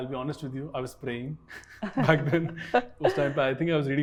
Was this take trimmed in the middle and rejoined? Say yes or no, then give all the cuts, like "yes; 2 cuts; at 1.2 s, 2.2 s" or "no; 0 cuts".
no; 0 cuts